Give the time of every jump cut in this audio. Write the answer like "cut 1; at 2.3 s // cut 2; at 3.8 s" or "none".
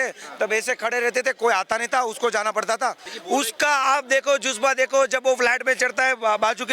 cut 1; at 3.1 s

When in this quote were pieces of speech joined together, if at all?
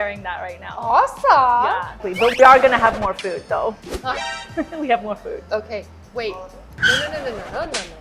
cut 1; at 1.9 s

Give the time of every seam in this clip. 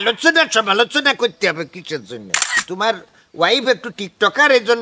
cut 1; at 2.5 s

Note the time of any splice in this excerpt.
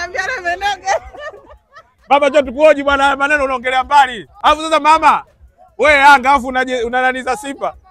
cut 1; at 4.3 s

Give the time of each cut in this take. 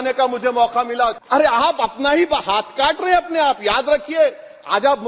cut 1; at 1.2 s

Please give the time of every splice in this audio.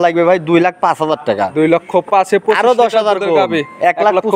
none

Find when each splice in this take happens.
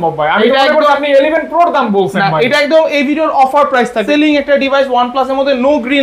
cut 1; at 4.0 s

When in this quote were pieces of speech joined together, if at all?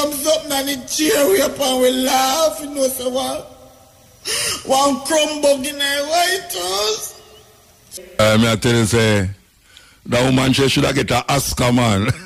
cut 1; at 8.0 s

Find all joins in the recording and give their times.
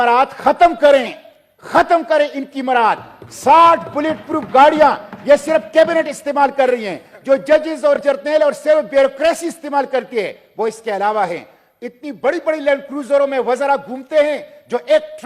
none

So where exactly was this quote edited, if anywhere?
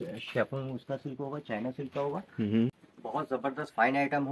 cut 1; at 2.8 s

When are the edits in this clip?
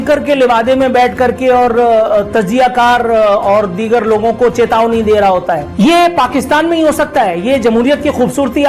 cut 1; at 5.7 s

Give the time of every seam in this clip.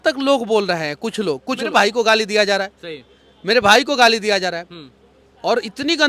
cut 1; at 1.6 s

